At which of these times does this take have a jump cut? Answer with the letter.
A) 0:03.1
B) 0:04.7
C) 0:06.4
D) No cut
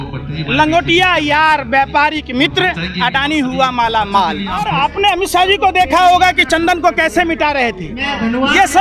B